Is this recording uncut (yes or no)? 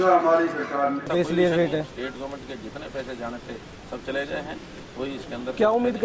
no